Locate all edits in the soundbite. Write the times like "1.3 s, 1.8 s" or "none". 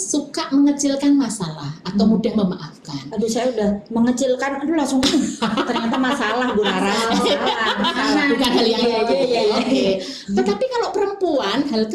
none